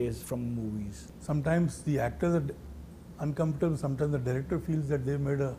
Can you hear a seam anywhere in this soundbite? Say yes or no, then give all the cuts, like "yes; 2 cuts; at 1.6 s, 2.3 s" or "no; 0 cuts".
yes; 1 cut; at 1.0 s